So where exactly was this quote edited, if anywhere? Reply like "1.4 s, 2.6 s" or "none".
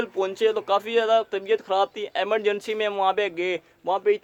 none